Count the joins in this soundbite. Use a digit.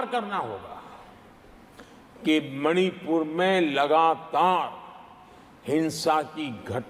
0